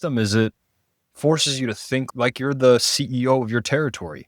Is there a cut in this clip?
yes; 1 cut; at 2.1 s

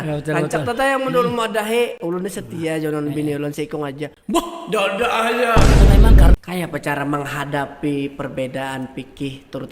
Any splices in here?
yes; 1 cut; at 6.3 s

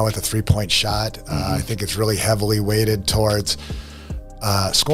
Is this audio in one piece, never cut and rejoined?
yes; 0 cuts

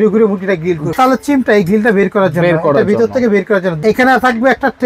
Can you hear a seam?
yes; 2 cuts; at 0.9 s, 3.8 s

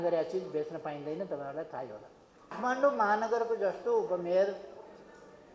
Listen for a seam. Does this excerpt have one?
yes; 1 cut; at 2.6 s

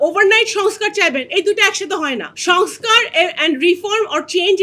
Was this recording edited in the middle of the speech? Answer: no; 0 cuts

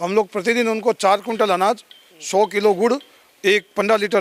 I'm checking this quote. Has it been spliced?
no; 0 cuts

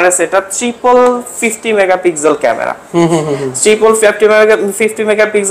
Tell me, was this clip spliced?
no; 0 cuts

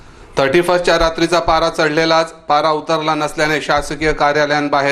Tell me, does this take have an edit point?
no; 0 cuts

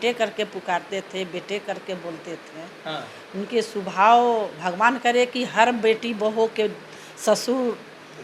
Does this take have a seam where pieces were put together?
no; 0 cuts

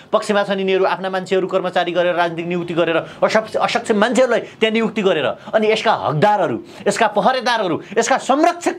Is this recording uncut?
yes; 0 cuts

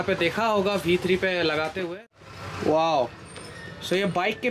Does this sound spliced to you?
yes; 1 cut; at 1.8 s

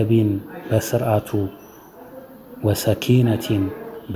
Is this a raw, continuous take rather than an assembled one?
yes; 0 cuts

